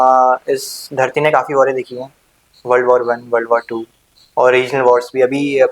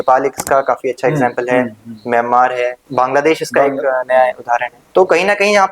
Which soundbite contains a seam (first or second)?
second